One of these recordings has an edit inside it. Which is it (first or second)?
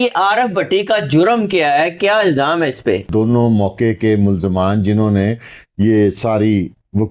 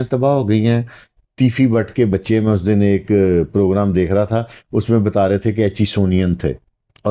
first